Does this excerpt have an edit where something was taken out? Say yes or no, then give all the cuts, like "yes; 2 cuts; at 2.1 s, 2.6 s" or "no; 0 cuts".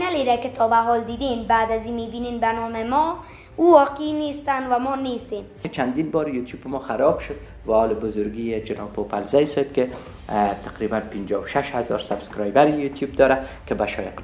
yes; 1 cut; at 5.7 s